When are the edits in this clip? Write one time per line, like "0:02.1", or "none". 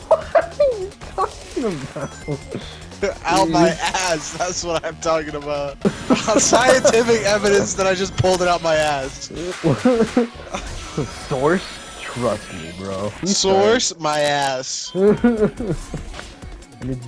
0:05.8
0:13.2
0:16.1